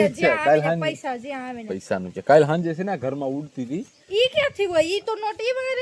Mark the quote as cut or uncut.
uncut